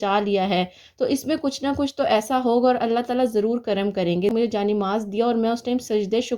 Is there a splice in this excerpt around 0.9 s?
no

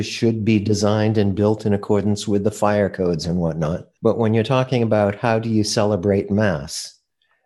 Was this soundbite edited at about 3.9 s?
yes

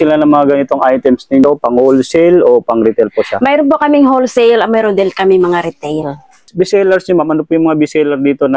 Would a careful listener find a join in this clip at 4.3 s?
no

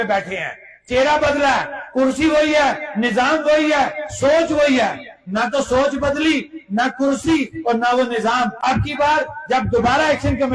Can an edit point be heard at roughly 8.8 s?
yes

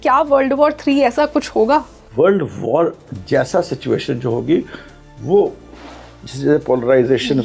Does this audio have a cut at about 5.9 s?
no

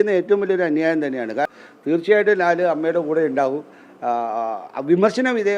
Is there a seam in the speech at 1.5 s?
yes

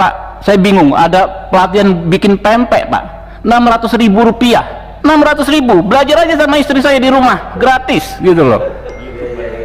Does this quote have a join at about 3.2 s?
no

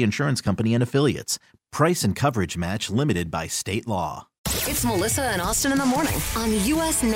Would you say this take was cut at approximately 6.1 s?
no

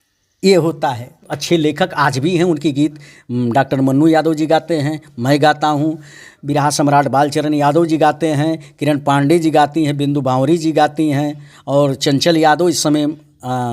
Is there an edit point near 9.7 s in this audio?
no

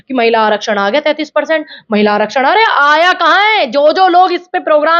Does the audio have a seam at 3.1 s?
no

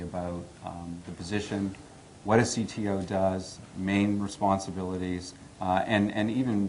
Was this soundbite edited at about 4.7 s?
yes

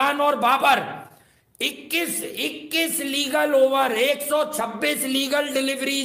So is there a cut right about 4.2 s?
no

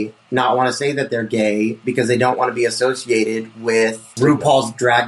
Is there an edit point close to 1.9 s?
no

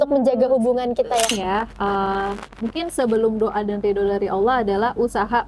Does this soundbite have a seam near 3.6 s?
no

